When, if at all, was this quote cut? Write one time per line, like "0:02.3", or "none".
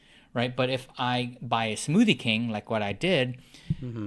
none